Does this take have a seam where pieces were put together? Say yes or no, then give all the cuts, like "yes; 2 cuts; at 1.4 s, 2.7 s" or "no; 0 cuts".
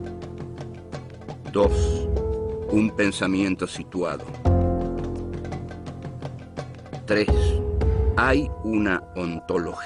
yes; 1 cut; at 2.6 s